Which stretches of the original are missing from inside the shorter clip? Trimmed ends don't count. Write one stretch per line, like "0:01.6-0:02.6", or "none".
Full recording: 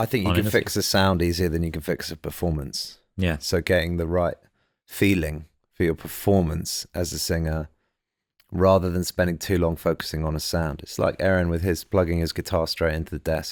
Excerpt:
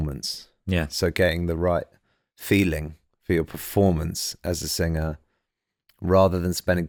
none